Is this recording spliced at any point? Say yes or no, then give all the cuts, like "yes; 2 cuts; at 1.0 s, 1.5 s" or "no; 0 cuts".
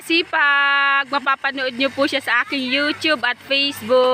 no; 0 cuts